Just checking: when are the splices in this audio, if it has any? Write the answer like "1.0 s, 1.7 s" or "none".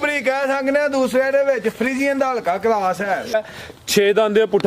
3.4 s

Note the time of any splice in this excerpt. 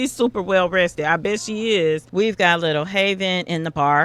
2.1 s

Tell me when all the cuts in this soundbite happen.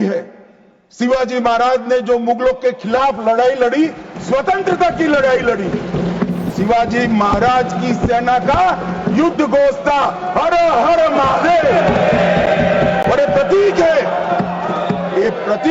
6.5 s

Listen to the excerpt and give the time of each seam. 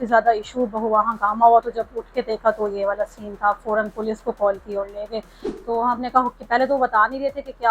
5.4 s

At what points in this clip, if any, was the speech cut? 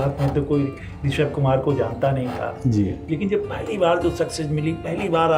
none

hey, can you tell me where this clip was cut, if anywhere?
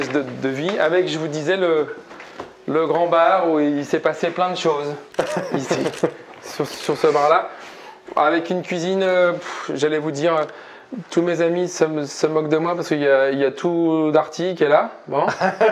none

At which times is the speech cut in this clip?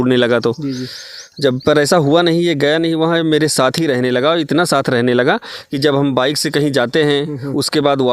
none

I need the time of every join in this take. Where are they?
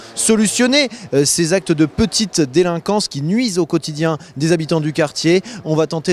3.2 s

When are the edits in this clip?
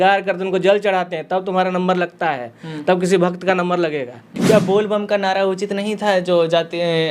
4.3 s

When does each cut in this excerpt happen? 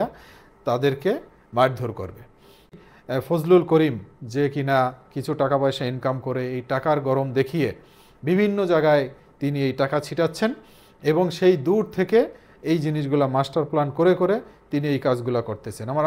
2.7 s

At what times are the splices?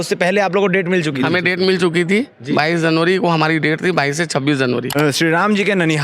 4.9 s

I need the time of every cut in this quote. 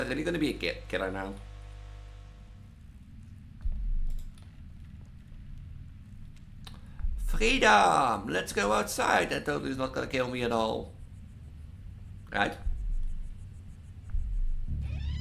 2.4 s

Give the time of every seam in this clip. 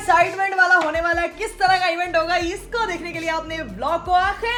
none

